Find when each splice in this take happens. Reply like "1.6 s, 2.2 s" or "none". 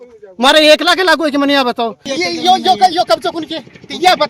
2.1 s

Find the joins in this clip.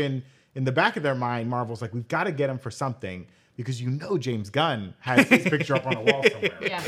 none

